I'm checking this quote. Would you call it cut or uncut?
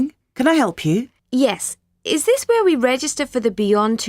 cut